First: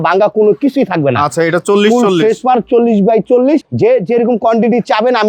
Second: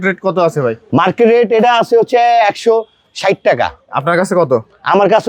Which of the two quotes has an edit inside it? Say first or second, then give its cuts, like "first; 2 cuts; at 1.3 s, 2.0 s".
first; 1 cut; at 3.7 s